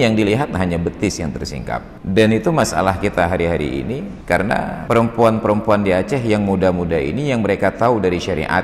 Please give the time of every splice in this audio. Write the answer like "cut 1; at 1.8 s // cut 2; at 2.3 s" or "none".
cut 1; at 1.9 s // cut 2; at 4.1 s // cut 3; at 4.8 s